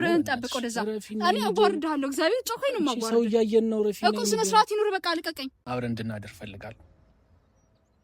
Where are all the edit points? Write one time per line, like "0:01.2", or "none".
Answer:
0:05.5